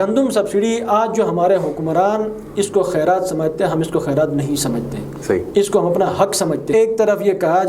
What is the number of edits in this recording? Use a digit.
1